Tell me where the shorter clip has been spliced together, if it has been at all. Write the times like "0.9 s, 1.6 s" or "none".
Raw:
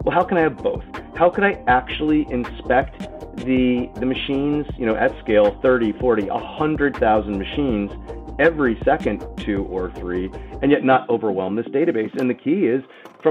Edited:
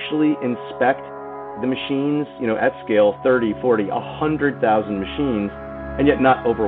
1.5 s, 5.8 s